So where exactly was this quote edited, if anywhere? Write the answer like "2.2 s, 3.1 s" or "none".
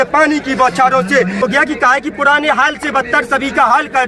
1.4 s